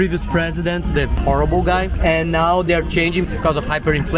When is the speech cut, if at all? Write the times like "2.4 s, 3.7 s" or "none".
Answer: none